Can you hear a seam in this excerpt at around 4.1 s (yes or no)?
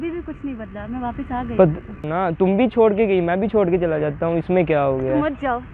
no